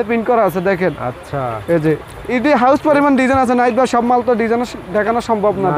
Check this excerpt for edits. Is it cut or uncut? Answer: uncut